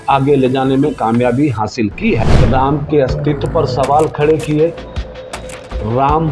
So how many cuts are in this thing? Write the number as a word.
one